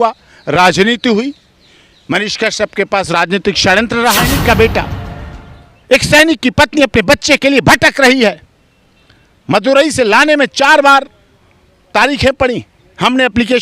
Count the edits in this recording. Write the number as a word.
one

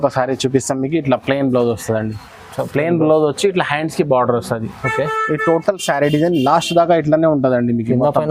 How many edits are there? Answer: zero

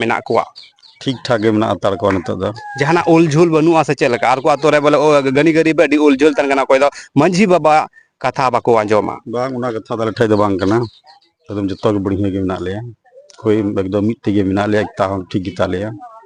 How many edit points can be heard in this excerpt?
zero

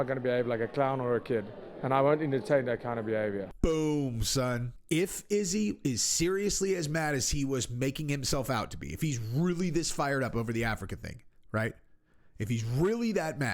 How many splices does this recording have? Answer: two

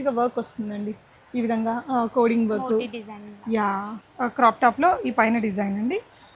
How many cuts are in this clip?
one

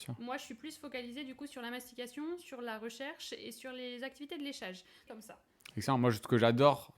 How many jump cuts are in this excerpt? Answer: one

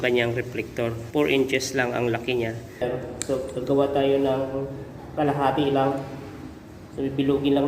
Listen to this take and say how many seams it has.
two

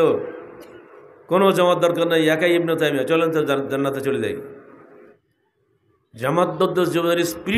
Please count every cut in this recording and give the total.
one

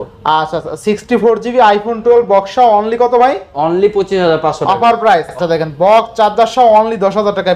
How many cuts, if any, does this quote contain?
one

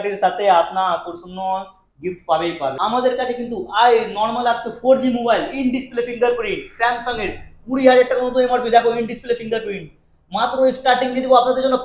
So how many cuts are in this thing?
one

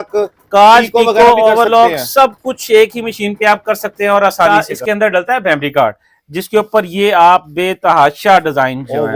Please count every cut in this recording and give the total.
one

